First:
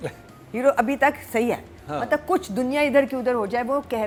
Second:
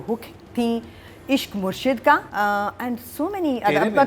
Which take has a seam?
second; 1 cut; at 2.3 s

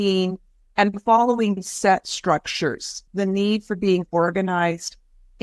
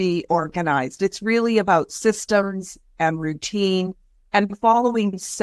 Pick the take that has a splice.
first; 1 cut; at 3.0 s

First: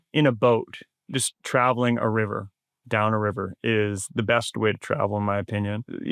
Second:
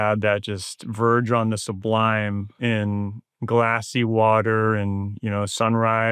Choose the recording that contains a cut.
second; 1 cut; at 2.5 s

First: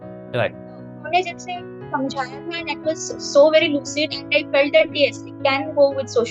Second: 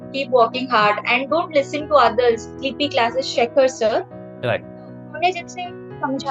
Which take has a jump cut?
second; 1 cut; at 2.6 s

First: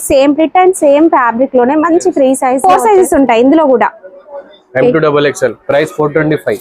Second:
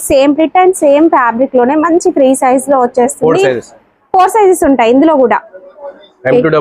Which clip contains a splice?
first; 1 cut; at 2.6 s

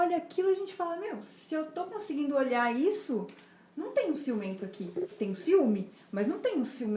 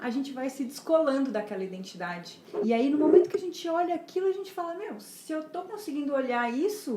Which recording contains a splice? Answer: second; 1 cut; at 2.4 s

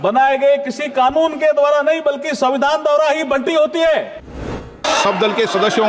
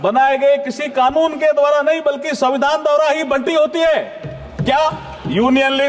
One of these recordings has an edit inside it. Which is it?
first; 1 cut; at 4.6 s

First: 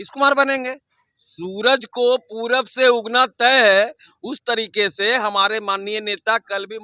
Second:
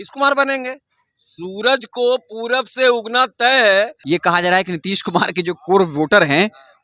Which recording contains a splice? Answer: second; 1 cut; at 4.0 s

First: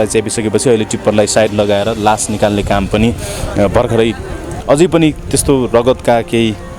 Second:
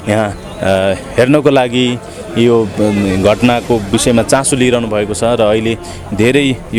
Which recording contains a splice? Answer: first; 1 cut; at 4.5 s

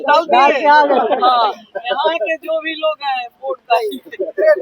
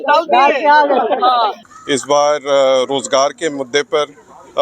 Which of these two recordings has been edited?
second; 1 cut; at 1.7 s

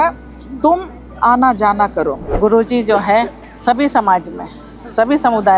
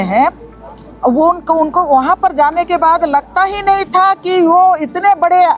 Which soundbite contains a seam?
first; 1 cut; at 2.2 s

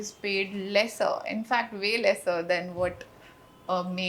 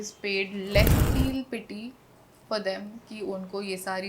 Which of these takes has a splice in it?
second; 1 cut; at 0.9 s

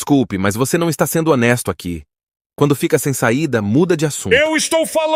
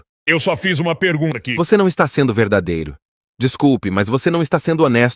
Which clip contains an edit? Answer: second; 1 cut; at 1.3 s

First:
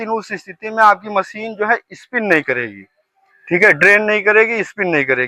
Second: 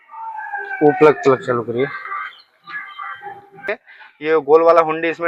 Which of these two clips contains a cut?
second; 1 cut; at 3.7 s

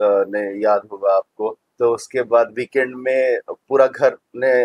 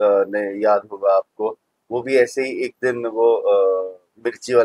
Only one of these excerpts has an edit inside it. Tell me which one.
first; 1 cut; at 1.6 s

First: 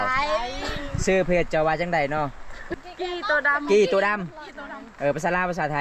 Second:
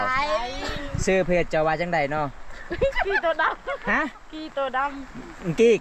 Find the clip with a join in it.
first; 1 cut; at 2.6 s

